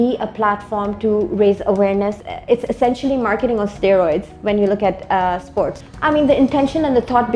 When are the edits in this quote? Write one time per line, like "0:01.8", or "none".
0:02.2
0:05.8